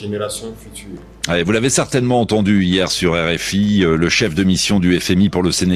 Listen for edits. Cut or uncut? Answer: cut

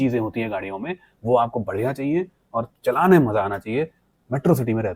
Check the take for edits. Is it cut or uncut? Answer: uncut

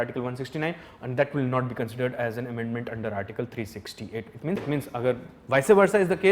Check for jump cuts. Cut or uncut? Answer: cut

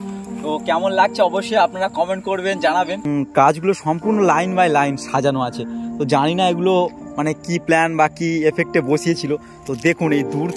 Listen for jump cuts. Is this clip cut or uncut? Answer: cut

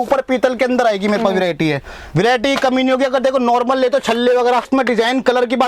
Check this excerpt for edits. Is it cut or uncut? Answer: cut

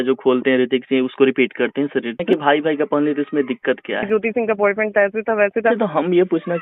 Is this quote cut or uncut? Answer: cut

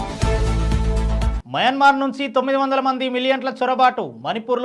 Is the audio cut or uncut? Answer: cut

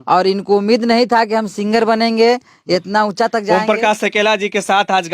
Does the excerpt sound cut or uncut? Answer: cut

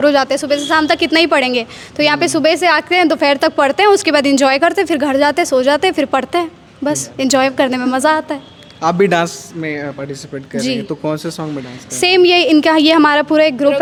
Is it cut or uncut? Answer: uncut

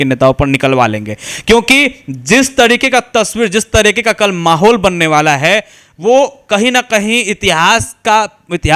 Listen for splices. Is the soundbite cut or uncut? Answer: uncut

